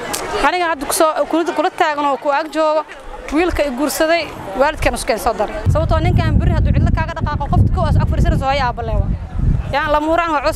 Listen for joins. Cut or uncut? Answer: cut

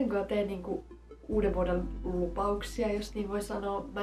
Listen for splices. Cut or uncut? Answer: uncut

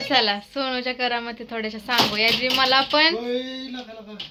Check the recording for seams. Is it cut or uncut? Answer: uncut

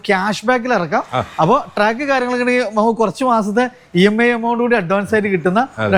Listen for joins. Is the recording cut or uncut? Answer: uncut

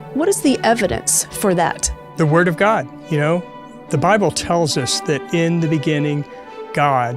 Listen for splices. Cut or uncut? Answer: cut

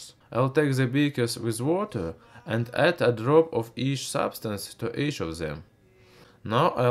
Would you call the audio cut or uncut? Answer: cut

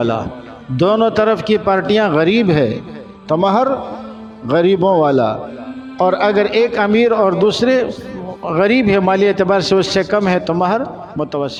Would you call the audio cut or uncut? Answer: uncut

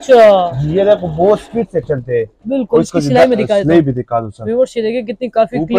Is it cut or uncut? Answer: uncut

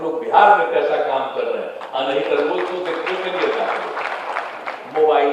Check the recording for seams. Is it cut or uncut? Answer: uncut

